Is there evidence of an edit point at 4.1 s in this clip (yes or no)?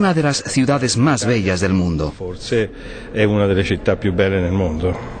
yes